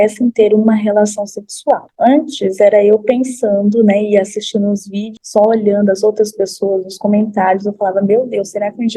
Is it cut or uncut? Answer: cut